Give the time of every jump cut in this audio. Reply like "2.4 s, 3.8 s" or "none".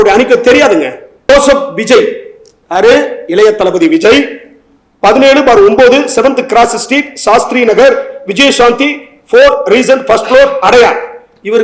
1.3 s